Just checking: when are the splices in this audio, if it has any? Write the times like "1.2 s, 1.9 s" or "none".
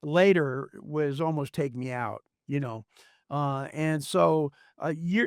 none